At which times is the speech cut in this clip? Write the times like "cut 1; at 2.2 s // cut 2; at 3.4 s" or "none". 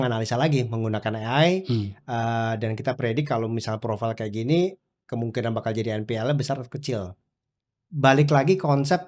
cut 1; at 7.2 s